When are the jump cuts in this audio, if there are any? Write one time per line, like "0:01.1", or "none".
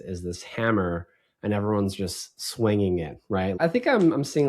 0:03.6

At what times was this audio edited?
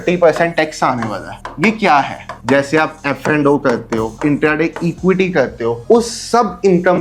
0:02.3
0:04.2
0:05.8

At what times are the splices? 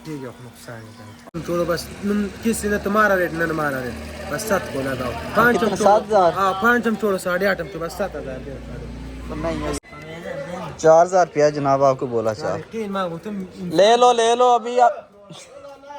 0:01.4
0:09.8

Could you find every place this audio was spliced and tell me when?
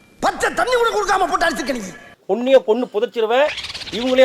0:02.0

